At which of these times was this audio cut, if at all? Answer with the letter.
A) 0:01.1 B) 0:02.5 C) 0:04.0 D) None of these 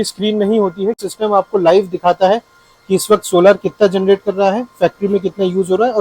A